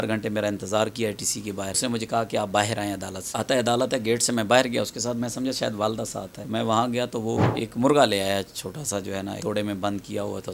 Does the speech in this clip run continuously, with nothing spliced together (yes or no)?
no